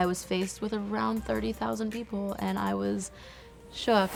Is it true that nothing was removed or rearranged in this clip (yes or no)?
yes